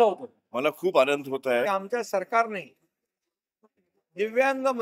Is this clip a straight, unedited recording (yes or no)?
no